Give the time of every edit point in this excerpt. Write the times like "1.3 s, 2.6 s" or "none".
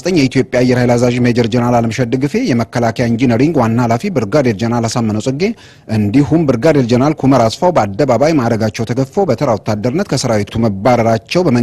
none